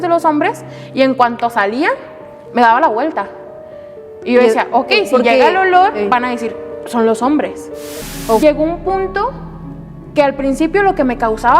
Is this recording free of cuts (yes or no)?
no